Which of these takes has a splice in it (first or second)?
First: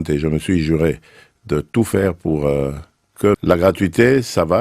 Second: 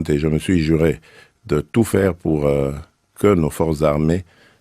first